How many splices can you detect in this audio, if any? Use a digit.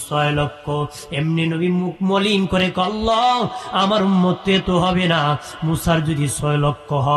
0